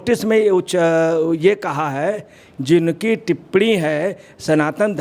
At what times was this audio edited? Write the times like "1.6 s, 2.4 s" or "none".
2.5 s